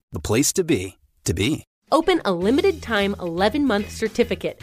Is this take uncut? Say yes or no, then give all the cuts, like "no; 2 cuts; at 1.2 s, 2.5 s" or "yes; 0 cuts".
no; 1 cut; at 1.7 s